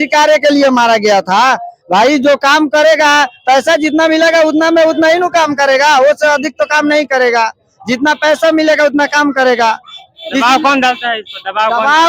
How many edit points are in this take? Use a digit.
0